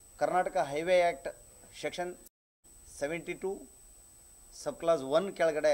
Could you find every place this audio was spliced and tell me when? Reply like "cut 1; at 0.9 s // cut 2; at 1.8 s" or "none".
none